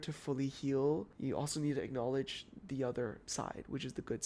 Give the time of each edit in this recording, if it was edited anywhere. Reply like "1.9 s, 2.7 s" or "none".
1.1 s, 3.2 s

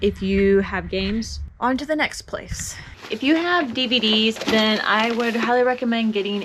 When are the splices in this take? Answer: none

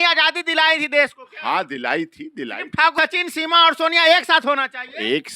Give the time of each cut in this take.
2.9 s

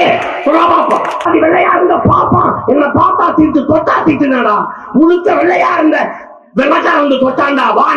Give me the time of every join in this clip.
1.3 s

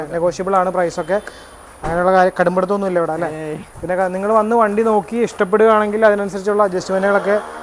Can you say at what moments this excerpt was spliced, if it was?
none

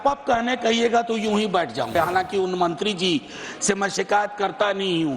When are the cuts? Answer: 1.9 s

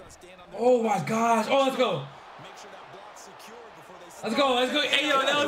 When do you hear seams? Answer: none

